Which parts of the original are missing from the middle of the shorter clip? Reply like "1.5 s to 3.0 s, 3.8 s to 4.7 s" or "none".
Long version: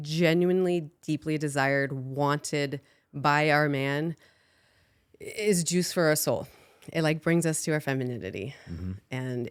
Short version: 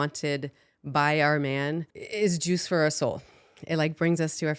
4.3 s to 5.2 s